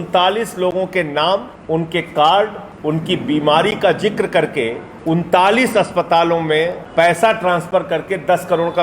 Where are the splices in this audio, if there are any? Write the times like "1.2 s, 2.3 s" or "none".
1.5 s, 2.7 s, 4.9 s, 6.8 s